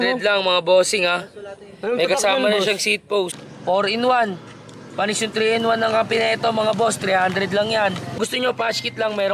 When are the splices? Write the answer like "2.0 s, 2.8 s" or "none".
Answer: 3.4 s, 8.2 s

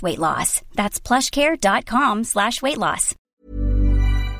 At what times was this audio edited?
3.4 s

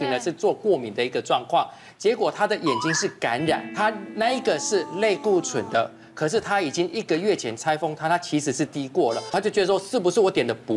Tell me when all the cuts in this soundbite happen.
9.3 s

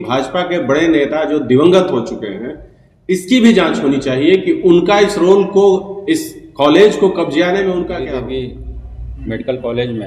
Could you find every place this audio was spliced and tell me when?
8.0 s

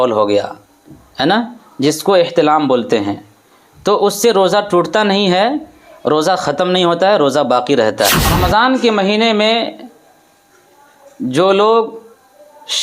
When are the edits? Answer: 8.2 s

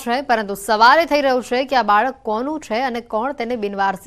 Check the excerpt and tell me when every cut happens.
none

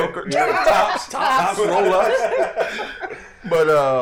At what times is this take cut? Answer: none

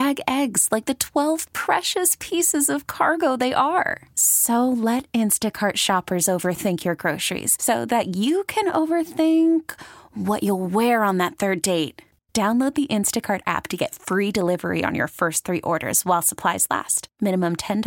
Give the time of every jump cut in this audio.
none

